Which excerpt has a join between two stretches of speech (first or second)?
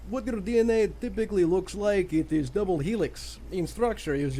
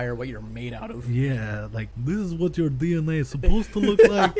second